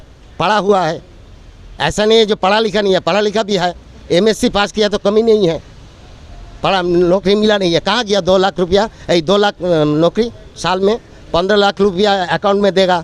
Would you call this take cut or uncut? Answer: uncut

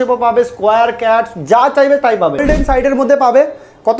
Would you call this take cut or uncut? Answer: cut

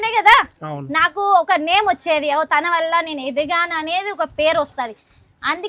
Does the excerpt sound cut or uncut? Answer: uncut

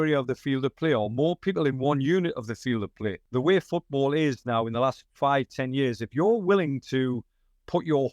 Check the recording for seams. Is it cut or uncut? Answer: cut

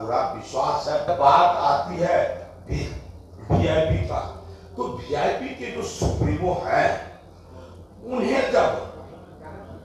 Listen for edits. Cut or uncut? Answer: cut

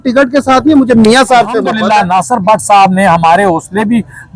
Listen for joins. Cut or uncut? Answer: cut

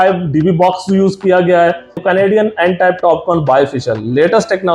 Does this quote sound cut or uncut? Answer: cut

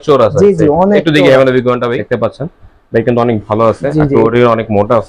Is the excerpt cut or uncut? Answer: cut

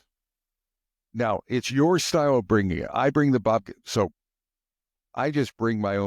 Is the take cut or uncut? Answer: uncut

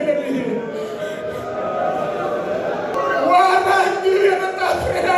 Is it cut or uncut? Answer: cut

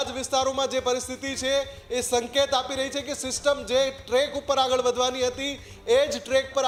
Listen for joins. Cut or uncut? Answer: uncut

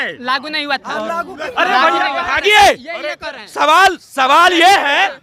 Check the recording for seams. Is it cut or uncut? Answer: cut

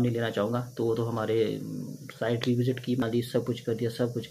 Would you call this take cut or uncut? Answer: cut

